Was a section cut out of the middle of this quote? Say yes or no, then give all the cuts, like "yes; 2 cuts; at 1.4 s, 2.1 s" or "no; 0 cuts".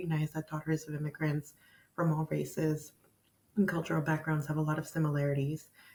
no; 0 cuts